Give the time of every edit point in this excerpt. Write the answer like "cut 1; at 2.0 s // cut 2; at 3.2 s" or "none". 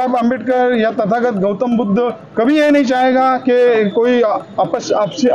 none